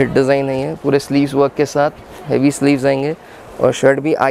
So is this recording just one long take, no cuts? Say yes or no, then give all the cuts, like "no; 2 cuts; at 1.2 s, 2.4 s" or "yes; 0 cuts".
yes; 0 cuts